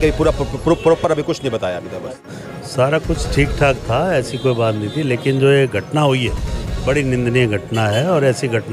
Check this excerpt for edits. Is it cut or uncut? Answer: cut